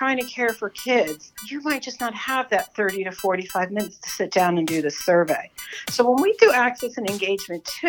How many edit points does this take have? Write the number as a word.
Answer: one